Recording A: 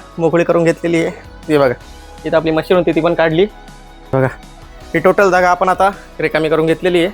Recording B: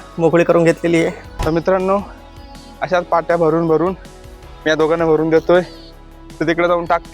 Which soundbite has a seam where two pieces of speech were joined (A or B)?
B